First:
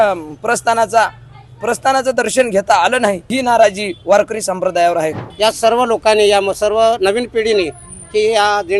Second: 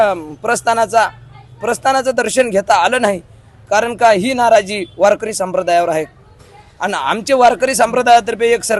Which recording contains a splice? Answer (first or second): first